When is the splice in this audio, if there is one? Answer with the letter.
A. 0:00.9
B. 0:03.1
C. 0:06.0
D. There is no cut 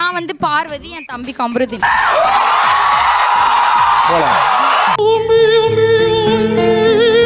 D